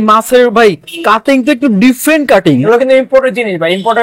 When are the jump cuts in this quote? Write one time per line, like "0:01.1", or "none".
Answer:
0:02.6